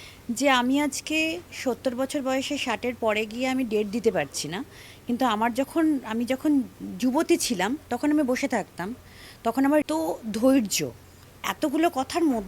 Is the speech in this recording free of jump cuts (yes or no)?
no